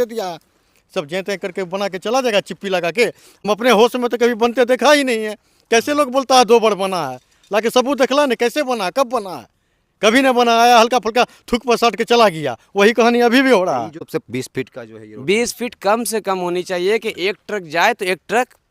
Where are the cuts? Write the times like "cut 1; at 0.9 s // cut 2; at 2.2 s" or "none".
cut 1; at 3.3 s // cut 2; at 14.0 s